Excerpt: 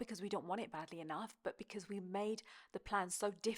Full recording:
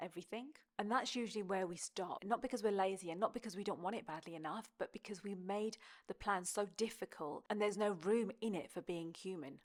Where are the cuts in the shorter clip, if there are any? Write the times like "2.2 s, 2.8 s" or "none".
none